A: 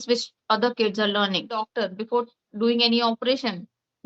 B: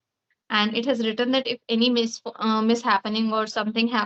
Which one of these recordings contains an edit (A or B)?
A